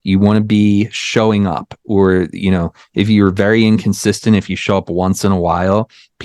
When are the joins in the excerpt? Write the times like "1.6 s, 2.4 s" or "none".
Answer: none